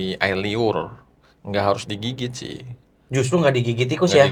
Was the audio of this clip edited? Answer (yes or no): no